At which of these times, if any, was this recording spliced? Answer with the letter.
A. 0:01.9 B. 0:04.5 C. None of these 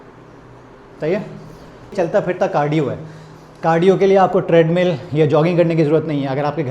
A